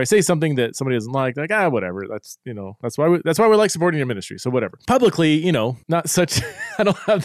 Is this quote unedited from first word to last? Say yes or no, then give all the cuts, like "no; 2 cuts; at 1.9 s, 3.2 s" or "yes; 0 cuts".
no; 2 cuts; at 4.8 s, 5.8 s